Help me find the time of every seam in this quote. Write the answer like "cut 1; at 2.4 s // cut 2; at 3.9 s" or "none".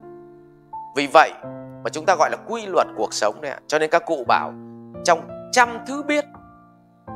cut 1; at 0.9 s